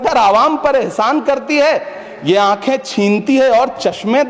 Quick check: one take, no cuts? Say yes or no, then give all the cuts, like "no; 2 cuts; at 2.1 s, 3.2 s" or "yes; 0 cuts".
yes; 0 cuts